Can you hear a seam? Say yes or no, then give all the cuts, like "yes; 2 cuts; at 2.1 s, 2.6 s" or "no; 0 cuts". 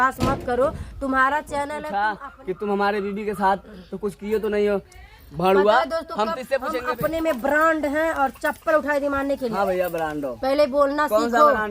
yes; 2 cuts; at 1.8 s, 6.7 s